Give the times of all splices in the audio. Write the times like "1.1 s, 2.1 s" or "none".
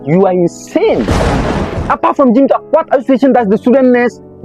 1.3 s